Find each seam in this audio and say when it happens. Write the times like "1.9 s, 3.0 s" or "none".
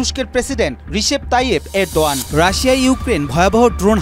2.2 s